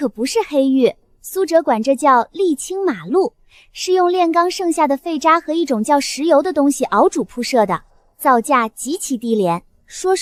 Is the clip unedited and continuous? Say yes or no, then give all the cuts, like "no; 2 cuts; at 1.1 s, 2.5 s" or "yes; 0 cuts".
yes; 0 cuts